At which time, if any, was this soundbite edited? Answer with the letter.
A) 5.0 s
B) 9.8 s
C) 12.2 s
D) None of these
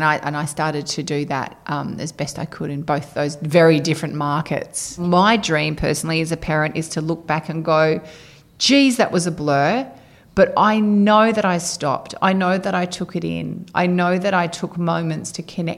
A